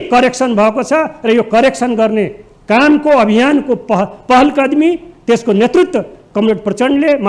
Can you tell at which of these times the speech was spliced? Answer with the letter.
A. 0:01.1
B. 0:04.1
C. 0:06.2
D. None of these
D